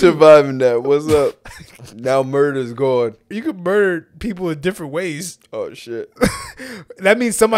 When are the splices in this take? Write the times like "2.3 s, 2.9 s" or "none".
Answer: 3.3 s